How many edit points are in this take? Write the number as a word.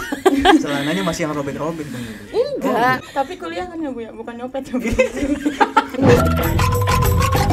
two